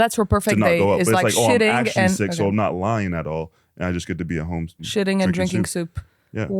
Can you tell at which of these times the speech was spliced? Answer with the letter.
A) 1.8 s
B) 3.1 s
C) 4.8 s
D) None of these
C